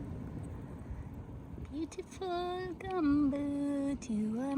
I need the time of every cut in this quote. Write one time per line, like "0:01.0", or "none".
0:01.3